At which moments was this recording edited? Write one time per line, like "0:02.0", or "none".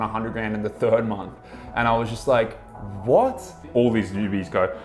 0:03.7

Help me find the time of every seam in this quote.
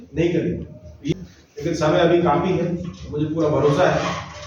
0:01.1

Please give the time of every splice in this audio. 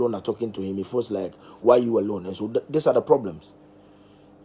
none

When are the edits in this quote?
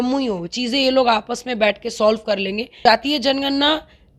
0:02.7

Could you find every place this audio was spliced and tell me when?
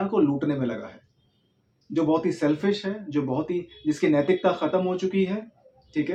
none

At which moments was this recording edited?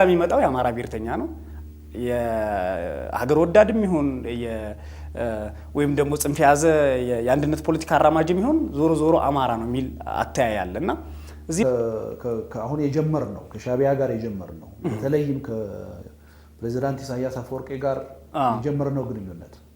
0:11.6

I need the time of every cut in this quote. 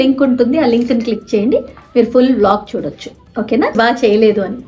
0:03.8

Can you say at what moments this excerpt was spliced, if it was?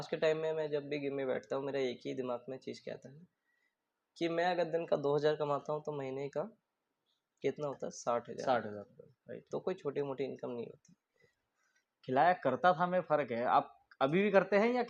0:11.3

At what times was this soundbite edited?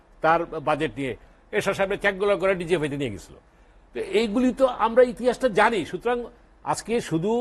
0:01.3

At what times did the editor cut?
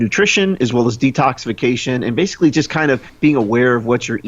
none

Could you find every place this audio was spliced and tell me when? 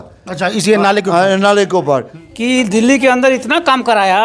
0:02.1

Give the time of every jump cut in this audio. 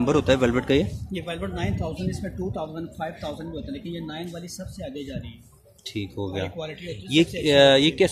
none

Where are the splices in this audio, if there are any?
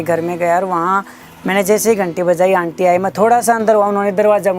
none

